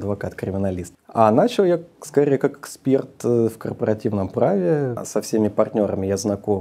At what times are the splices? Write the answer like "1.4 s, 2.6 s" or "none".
0.9 s, 5.0 s